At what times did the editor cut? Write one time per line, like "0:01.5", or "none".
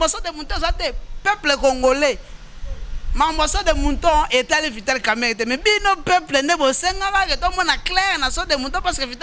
none